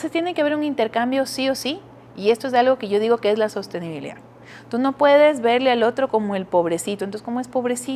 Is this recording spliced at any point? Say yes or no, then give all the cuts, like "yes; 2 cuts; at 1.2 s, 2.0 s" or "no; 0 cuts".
no; 0 cuts